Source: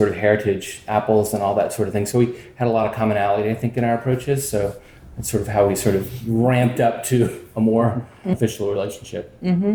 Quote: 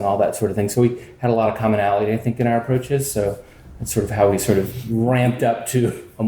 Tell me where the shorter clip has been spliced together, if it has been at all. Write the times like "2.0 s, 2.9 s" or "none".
none